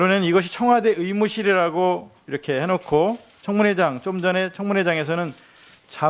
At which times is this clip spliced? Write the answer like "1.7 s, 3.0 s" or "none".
1.2 s